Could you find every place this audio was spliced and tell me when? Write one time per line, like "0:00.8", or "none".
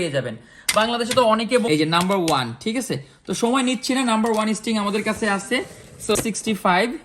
0:01.7
0:06.2